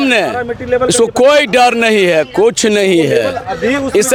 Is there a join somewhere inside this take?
no; 0 cuts

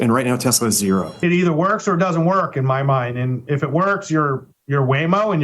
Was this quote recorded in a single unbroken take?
no; 1 cut; at 1.1 s

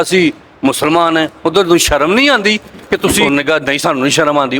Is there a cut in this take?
yes; 1 cut; at 3.2 s

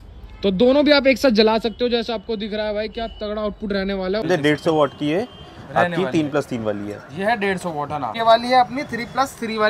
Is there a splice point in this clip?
yes; 2 cuts; at 4.2 s, 8.1 s

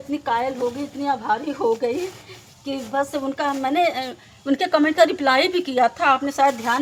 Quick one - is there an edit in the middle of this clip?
no; 0 cuts

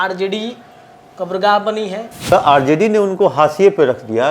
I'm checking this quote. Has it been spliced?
yes; 1 cut; at 2.3 s

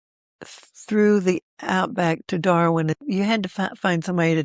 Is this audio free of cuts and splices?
no; 1 cut; at 3.0 s

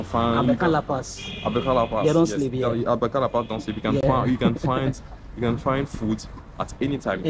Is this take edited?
no; 0 cuts

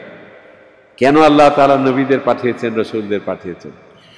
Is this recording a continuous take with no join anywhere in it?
yes; 0 cuts

